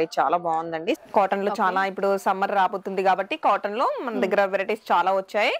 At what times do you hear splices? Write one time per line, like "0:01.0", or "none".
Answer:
0:01.0